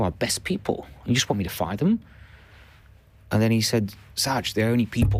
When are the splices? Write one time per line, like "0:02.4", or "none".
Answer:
none